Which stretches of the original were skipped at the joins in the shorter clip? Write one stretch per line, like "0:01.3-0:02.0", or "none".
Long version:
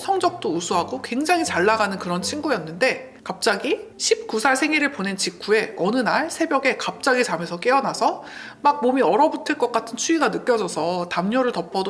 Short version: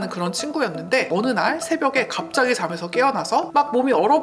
0:03.0-0:05.8
0:08.2-0:08.6